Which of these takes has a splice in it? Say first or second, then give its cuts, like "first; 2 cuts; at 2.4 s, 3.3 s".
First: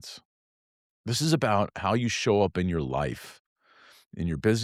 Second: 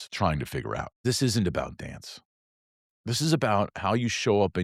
second; 1 cut; at 1.0 s